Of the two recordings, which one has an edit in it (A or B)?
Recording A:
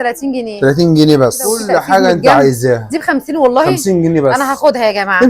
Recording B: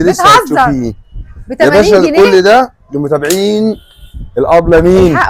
A